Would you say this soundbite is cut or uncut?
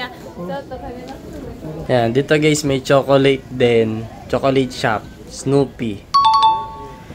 cut